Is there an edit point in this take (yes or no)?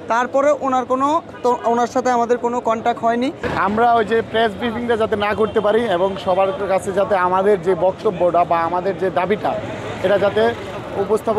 yes